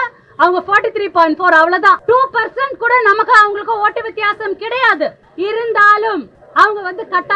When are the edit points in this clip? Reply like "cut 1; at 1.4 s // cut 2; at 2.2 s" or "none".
cut 1; at 2.0 s // cut 2; at 5.2 s // cut 3; at 6.4 s